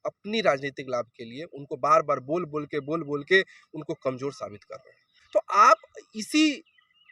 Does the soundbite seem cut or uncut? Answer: cut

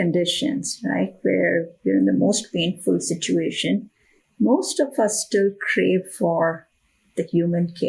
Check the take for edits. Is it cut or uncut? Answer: uncut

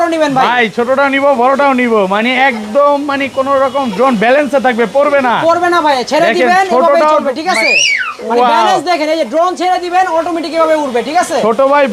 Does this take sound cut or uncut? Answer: uncut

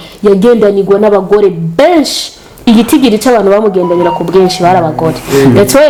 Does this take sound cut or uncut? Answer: uncut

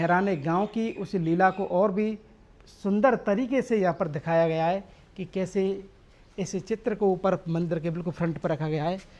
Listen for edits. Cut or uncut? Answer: uncut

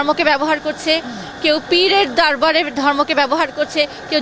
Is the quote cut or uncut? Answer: uncut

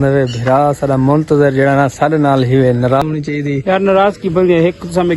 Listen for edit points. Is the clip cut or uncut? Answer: cut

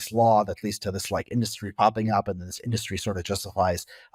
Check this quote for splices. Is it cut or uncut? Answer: uncut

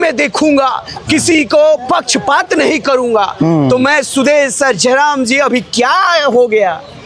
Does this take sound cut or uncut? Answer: uncut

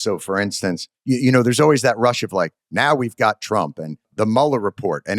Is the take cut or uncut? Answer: cut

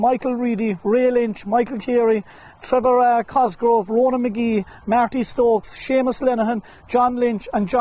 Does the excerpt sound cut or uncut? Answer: uncut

